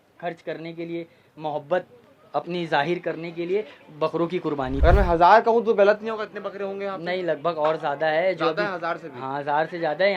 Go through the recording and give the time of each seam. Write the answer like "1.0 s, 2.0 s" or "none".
4.8 s